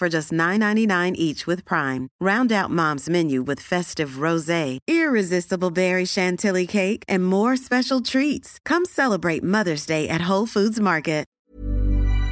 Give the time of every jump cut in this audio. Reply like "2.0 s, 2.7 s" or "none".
11.3 s